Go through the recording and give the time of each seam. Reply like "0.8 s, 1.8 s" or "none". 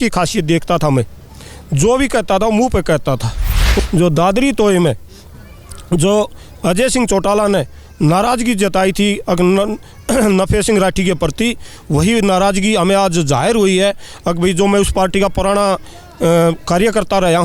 3.8 s